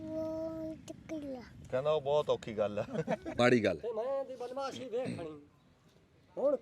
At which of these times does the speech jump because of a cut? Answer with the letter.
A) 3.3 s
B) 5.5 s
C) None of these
A